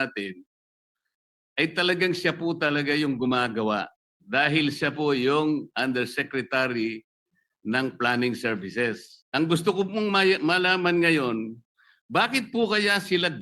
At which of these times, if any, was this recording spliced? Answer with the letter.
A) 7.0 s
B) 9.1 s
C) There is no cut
B